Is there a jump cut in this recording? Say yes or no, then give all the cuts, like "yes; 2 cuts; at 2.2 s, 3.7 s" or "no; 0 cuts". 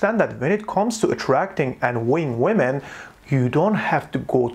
no; 0 cuts